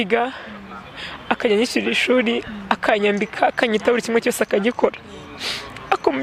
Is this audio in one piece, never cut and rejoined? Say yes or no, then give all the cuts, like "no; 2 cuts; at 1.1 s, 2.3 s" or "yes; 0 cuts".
yes; 0 cuts